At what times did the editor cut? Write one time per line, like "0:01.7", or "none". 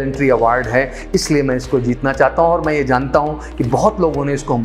none